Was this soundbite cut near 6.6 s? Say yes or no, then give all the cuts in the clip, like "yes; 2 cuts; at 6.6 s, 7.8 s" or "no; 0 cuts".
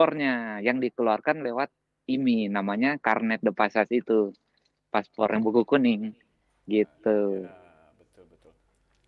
no; 0 cuts